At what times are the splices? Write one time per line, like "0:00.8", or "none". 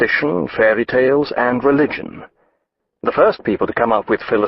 0:01.2